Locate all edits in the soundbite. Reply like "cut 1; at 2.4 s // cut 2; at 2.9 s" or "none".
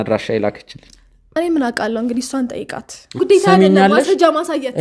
cut 1; at 3.2 s